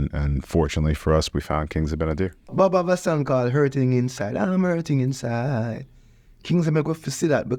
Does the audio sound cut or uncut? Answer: cut